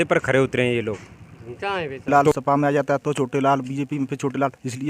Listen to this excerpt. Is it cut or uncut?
cut